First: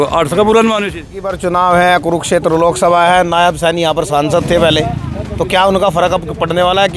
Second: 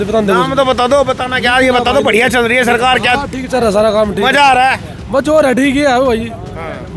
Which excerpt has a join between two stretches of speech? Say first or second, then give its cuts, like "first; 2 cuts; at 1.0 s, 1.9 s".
first; 1 cut; at 1.3 s